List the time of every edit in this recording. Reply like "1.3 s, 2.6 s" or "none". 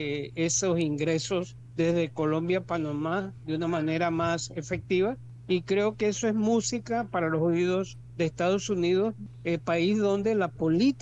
1.6 s, 5.3 s, 8.0 s, 9.3 s